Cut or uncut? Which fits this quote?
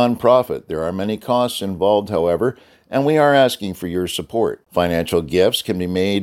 uncut